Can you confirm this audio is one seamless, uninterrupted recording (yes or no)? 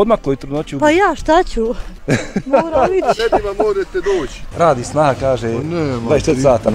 no